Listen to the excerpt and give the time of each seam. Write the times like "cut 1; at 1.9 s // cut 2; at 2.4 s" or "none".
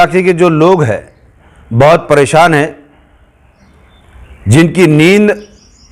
none

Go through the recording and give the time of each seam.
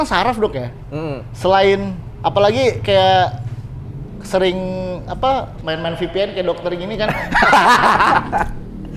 none

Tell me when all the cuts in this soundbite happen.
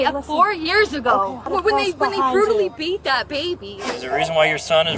cut 1; at 1.5 s // cut 2; at 3.9 s

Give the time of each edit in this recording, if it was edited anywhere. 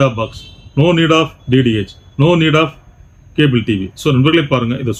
none

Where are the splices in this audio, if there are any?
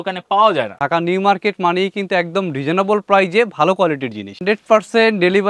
cut 1; at 0.7 s // cut 2; at 4.4 s

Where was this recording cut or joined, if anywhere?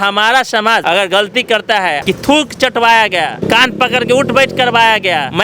cut 1; at 0.8 s // cut 2; at 2.0 s

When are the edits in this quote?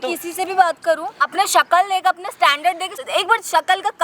cut 1; at 1.2 s // cut 2; at 3.0 s

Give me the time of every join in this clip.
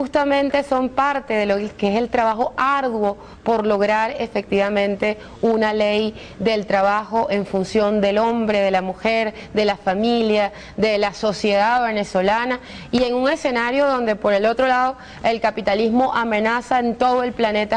none

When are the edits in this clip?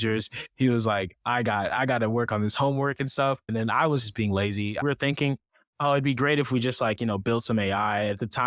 cut 1; at 3.5 s // cut 2; at 4.8 s

